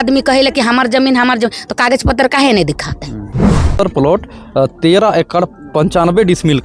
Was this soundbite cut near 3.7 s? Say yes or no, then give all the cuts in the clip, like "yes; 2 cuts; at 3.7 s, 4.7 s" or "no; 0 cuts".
yes; 1 cut; at 3.7 s